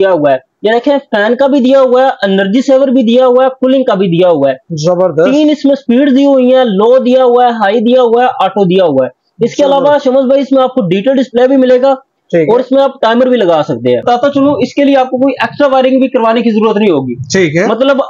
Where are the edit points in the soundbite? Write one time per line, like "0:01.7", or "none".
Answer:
0:14.0